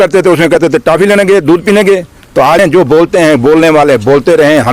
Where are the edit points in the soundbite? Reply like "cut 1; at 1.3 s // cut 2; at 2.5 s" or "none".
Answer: cut 1; at 2.6 s